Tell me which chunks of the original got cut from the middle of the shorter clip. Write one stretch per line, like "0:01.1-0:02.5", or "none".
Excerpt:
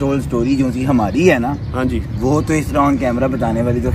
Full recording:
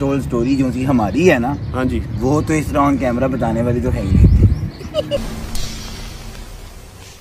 none

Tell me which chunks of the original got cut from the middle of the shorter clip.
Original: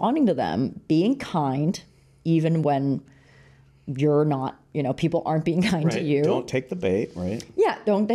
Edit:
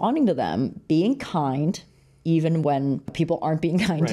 0:03.1-0:05.0

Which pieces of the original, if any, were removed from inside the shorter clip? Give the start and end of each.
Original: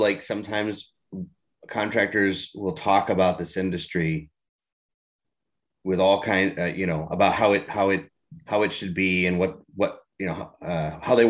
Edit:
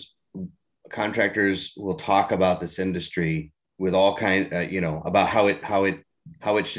0:04.4-0:05.6

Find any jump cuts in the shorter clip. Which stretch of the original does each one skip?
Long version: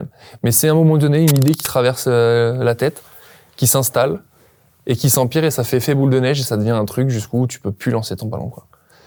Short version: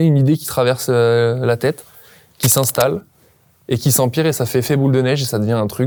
none

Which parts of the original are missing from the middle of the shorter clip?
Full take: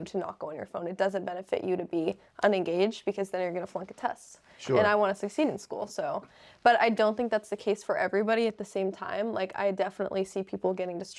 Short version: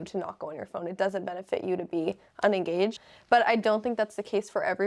0:03.0-0:06.3

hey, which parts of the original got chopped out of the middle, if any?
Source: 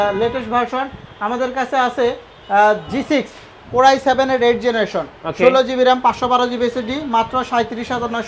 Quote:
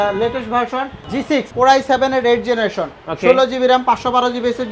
0:01.2-0:03.3

